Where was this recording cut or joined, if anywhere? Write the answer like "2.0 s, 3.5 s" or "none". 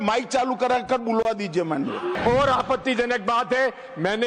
2.1 s